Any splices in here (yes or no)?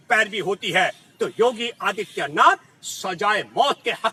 no